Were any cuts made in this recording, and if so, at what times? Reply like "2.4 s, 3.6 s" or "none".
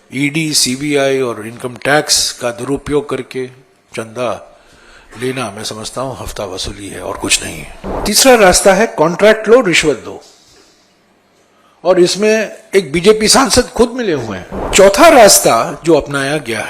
8.0 s, 14.7 s